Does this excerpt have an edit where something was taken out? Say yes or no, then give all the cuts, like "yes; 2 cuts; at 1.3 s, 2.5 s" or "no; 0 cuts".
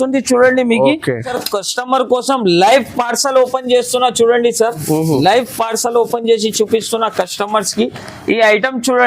yes; 1 cut; at 1.3 s